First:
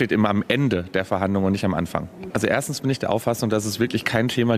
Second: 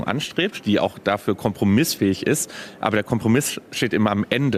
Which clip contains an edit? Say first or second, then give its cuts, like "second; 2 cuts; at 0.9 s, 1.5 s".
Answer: first; 1 cut; at 2.2 s